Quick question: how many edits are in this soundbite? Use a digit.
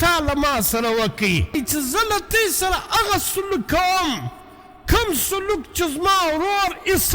1